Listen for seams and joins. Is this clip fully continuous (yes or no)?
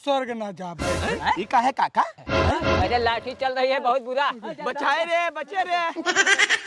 no